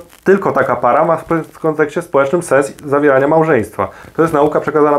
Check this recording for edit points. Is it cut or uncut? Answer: cut